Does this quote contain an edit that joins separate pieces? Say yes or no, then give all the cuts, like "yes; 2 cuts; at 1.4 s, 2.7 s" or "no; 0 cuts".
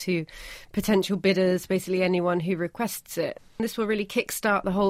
yes; 1 cut; at 3.5 s